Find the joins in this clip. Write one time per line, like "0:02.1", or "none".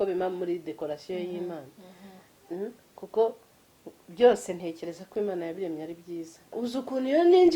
0:06.5